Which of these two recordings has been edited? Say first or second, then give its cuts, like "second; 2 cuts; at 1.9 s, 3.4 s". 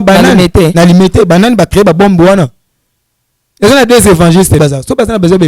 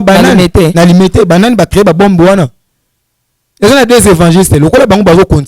first; 1 cut; at 4.6 s